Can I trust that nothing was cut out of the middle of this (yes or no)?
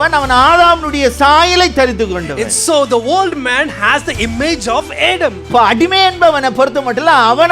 no